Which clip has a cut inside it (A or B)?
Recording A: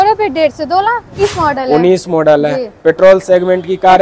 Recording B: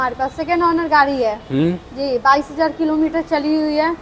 A